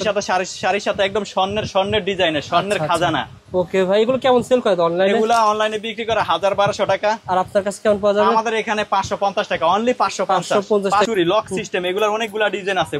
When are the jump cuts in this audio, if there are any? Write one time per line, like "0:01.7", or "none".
0:11.1